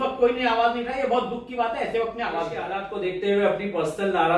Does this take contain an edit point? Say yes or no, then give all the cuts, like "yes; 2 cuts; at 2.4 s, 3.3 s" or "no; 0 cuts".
yes; 1 cut; at 2.8 s